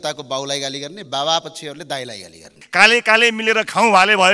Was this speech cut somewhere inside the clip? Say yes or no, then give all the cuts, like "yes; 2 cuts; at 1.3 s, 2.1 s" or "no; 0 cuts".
yes; 1 cut; at 2.6 s